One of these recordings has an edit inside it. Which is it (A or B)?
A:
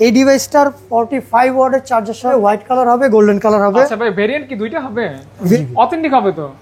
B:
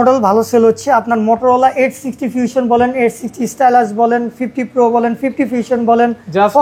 A